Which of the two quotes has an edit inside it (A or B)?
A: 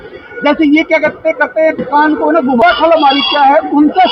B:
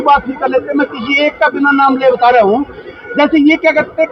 A